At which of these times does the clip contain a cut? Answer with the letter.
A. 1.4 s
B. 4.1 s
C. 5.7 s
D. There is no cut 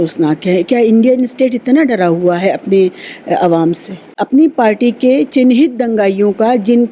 B